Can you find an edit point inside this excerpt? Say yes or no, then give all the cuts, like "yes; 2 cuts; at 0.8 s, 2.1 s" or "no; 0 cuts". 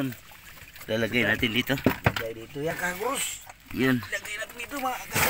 yes; 1 cut; at 2.7 s